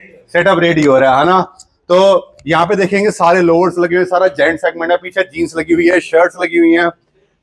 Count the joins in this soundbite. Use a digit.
0